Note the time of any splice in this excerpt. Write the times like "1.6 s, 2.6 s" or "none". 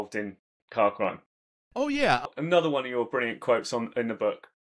2.2 s